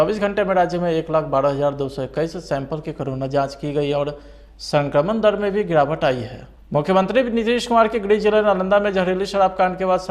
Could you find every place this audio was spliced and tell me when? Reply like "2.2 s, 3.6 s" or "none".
6.7 s